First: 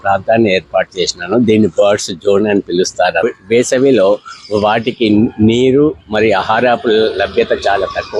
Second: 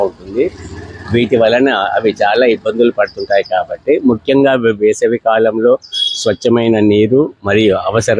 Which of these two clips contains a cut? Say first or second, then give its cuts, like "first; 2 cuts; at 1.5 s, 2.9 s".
first; 1 cut; at 3.2 s